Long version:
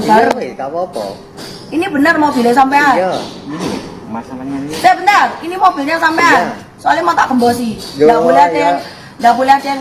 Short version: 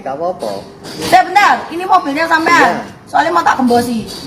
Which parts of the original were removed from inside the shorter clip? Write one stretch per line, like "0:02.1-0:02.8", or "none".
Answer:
0:01.5-0:04.7